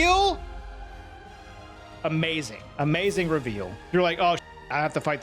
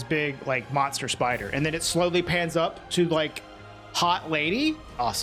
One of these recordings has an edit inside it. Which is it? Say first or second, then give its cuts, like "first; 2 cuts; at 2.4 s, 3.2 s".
first; 1 cut; at 3.8 s